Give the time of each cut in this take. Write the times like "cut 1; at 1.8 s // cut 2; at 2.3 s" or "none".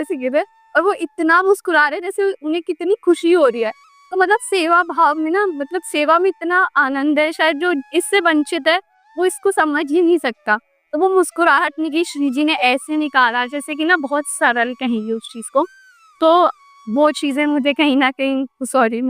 cut 1; at 11.9 s